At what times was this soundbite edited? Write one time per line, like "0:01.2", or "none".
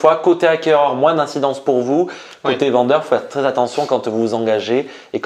none